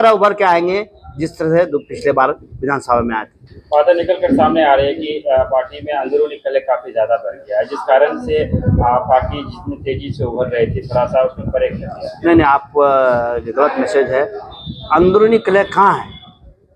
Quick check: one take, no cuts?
yes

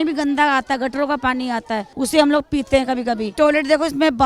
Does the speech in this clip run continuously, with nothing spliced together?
no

